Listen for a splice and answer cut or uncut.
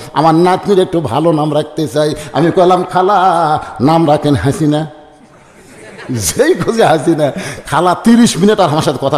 uncut